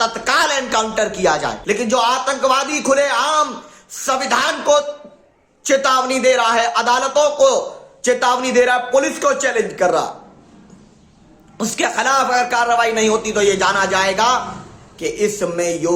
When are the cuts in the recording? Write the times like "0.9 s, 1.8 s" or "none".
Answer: 1.6 s